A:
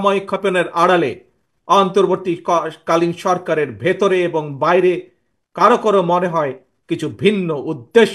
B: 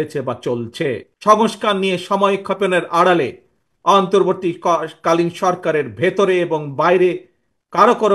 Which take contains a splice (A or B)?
B